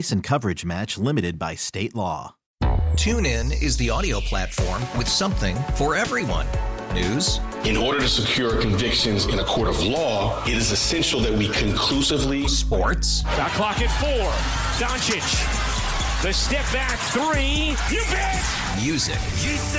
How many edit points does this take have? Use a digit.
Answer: 1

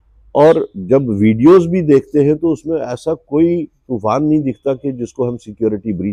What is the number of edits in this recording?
0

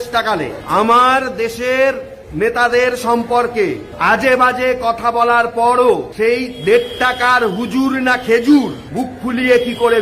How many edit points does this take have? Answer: 0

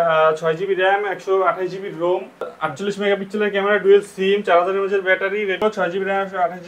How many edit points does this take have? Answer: 2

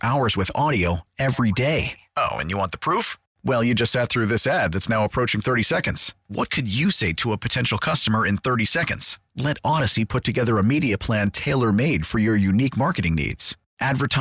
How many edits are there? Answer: 0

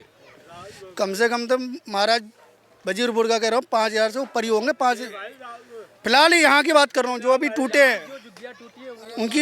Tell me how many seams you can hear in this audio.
0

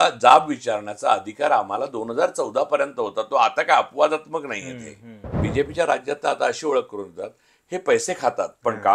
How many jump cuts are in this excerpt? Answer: 1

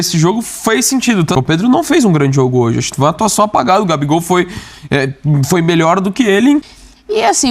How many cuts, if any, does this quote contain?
2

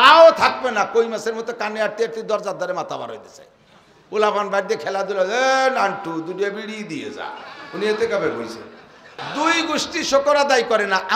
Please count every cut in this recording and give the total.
1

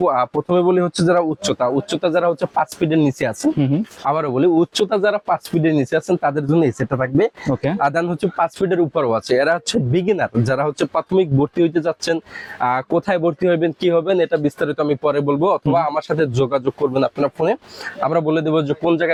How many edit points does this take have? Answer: 0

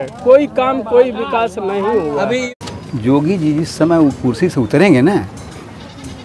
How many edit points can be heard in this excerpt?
1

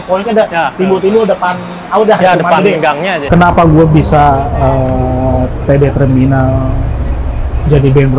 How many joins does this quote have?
1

